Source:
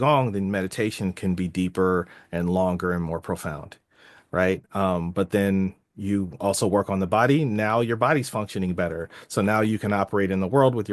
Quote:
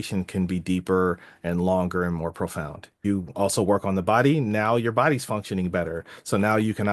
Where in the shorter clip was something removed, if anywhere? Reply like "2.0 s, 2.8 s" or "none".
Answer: 2.9 s